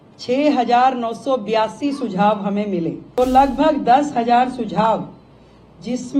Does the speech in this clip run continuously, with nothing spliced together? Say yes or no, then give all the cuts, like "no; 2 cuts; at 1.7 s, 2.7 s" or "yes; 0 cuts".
no; 1 cut; at 3.0 s